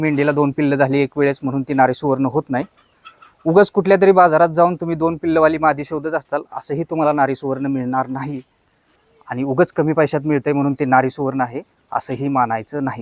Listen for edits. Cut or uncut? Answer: uncut